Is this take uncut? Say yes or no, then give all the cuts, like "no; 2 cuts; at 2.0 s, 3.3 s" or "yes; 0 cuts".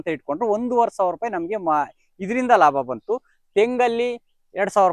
yes; 0 cuts